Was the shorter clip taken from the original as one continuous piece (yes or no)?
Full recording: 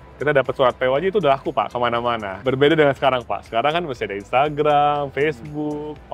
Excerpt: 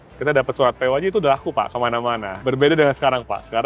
yes